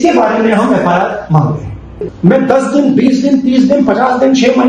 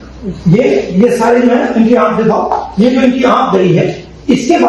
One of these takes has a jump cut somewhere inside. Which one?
first; 1 cut; at 2.0 s

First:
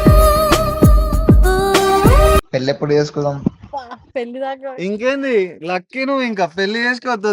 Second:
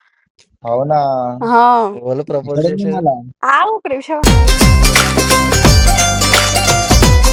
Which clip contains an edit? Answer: first; 1 cut; at 2.5 s

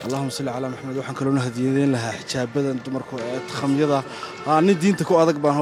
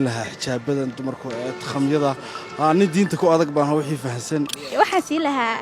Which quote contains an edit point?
second; 1 cut; at 4.7 s

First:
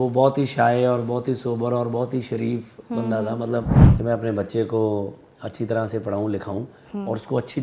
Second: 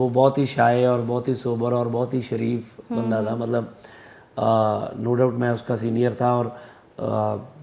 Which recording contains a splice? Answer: first; 1 cut; at 3.8 s

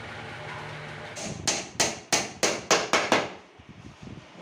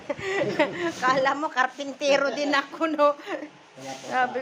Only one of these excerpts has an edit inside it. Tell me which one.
first; 1 cut; at 1.0 s

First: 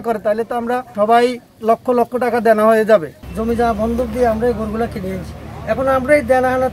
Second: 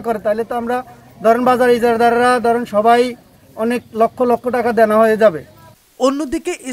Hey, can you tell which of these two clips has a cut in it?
first; 3 cuts; at 0.9 s, 1.5 s, 3.2 s

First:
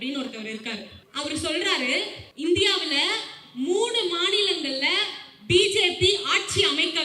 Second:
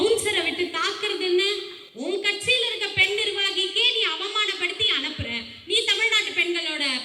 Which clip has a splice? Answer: first; 2 cuts; at 1.0 s, 2.2 s

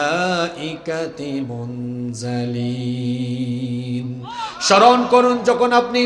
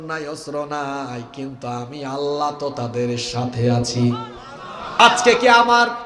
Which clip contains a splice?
second; 1 cut; at 5.0 s

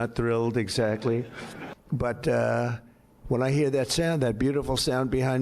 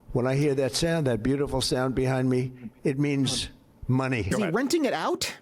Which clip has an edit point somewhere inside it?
second; 1 cut; at 4.3 s

